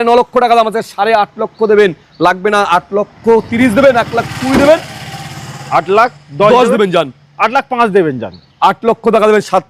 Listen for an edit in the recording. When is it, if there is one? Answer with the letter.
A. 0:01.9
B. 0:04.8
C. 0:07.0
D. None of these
D